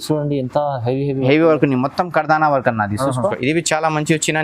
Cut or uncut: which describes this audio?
cut